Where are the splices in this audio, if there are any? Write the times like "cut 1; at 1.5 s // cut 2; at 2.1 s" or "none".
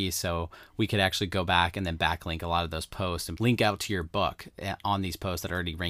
cut 1; at 3.3 s